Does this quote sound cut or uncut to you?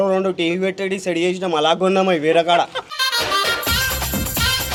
uncut